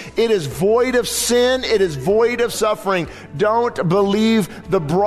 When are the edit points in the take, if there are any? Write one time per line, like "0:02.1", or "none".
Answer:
0:02.5

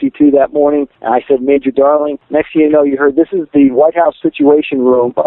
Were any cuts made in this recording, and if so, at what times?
0:01.0
0:02.2

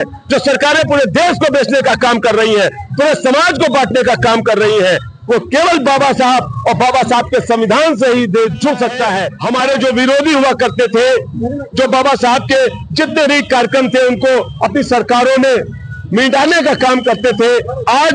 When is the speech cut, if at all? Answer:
0:09.3

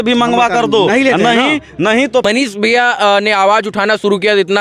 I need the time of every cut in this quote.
0:02.2

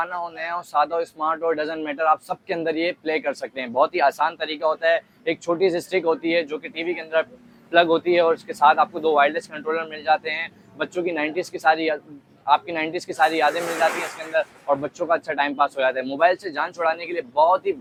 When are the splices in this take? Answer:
none

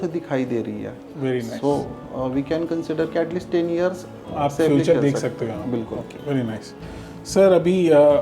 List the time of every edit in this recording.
none

